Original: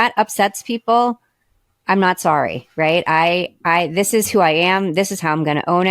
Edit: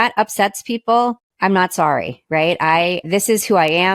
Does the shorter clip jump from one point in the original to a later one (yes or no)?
yes